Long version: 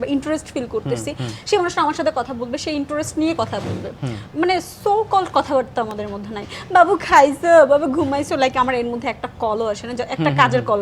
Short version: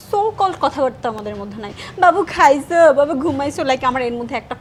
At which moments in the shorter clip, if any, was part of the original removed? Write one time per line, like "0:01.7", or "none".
none